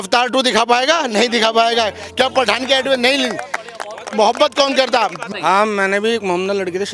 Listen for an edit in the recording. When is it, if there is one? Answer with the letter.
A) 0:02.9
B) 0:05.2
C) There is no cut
B